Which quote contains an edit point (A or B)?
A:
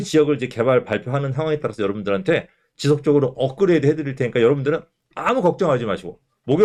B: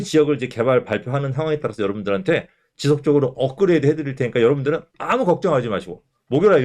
B